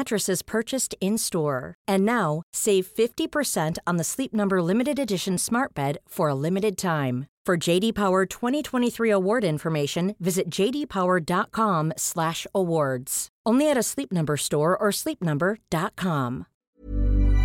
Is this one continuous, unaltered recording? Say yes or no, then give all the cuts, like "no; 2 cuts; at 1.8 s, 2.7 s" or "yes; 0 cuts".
no; 1 cut; at 16.5 s